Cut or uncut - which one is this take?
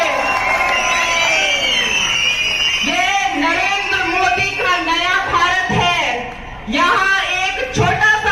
uncut